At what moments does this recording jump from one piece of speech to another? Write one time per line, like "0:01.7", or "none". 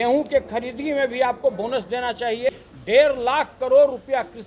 0:02.5